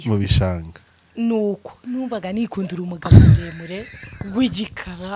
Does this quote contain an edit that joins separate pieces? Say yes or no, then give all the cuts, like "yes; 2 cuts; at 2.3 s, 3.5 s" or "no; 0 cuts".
no; 0 cuts